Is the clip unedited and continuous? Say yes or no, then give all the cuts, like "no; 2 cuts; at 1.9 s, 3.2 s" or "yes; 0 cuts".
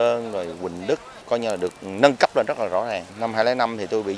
no; 2 cuts; at 1.2 s, 3.1 s